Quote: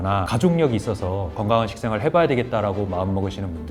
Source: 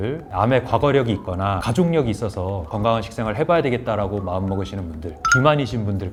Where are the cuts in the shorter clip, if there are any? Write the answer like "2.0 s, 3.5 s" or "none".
none